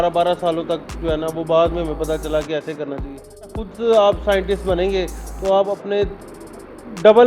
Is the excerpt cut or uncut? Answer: cut